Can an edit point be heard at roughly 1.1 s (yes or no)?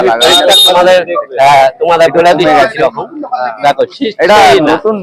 no